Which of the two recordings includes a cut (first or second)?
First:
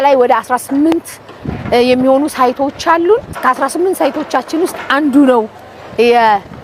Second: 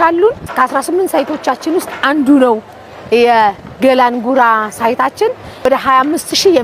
second